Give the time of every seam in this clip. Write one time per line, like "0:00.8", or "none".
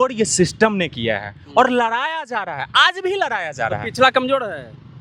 none